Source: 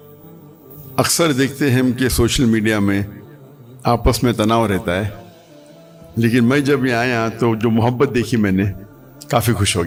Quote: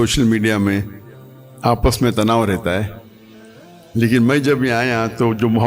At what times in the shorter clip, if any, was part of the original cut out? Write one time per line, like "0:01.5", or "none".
none